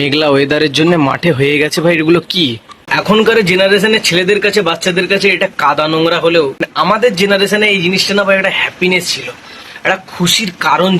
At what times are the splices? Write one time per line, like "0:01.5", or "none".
0:03.0
0:06.6